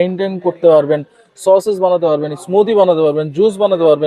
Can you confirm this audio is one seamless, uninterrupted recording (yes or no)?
yes